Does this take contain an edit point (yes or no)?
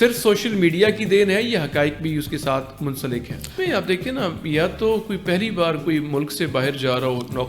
yes